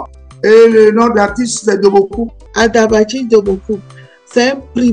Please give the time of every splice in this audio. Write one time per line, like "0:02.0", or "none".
none